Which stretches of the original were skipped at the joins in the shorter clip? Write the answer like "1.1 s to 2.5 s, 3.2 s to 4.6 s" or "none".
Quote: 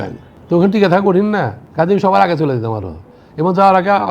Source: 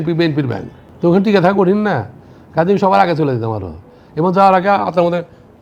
2.1 s to 2.4 s